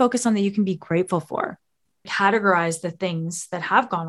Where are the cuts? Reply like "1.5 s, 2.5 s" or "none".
2.1 s